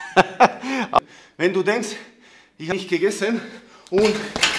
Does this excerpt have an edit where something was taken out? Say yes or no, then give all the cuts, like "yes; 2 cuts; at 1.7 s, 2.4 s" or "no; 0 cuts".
yes; 2 cuts; at 1.0 s, 2.7 s